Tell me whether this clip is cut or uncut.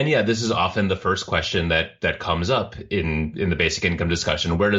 uncut